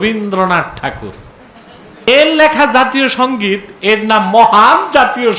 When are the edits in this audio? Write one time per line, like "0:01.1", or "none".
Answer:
0:02.1